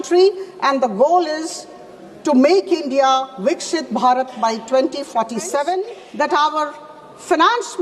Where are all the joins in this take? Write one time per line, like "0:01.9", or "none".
0:06.0